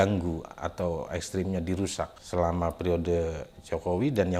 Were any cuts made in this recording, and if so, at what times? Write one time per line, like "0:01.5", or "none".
none